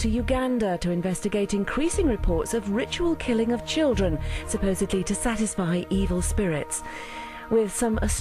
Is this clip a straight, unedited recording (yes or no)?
yes